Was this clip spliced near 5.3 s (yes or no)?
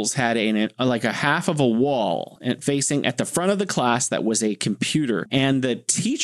yes